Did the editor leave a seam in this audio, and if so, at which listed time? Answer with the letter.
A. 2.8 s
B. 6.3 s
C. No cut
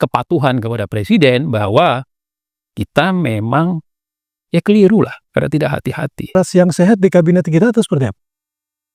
B